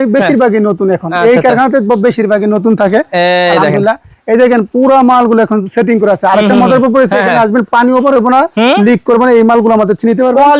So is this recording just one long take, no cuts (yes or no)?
yes